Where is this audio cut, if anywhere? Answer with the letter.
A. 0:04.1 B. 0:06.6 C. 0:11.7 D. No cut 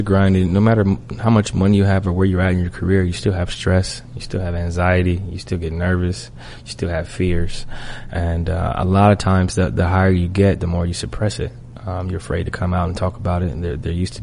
D